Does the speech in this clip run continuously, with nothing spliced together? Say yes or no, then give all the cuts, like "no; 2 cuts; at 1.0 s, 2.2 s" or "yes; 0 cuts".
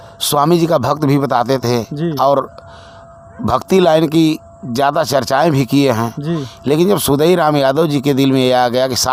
yes; 0 cuts